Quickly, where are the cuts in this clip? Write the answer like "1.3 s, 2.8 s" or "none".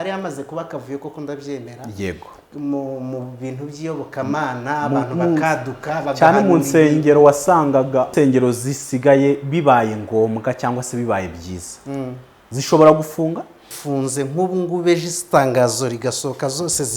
8.1 s, 13.7 s